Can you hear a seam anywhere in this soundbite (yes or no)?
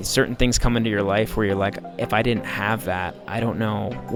no